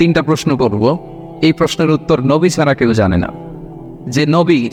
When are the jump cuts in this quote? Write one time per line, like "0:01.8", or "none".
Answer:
none